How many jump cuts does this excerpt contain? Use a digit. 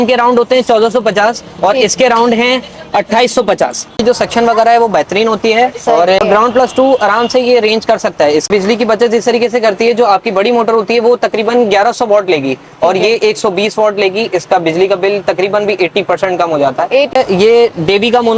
4